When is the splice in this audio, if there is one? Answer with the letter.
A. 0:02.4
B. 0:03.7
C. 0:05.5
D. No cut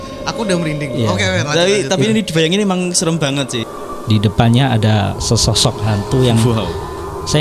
B